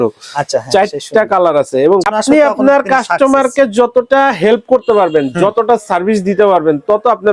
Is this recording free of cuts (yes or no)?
no